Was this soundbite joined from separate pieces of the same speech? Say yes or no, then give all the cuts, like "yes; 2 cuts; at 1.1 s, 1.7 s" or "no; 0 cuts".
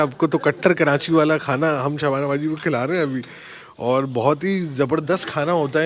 no; 0 cuts